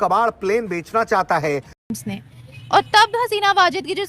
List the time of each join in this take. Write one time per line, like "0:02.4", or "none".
0:01.8